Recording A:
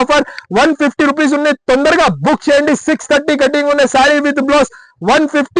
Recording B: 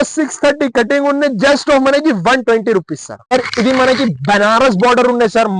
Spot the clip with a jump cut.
B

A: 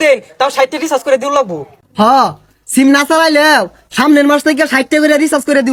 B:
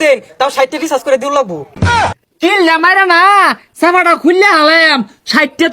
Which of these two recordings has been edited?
B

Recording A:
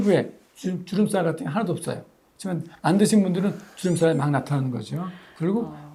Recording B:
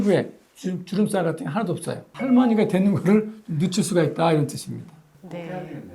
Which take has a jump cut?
B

